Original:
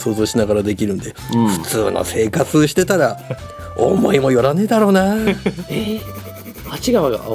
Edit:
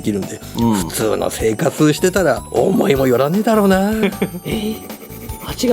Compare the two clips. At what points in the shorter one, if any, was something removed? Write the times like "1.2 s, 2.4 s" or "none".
2.4 s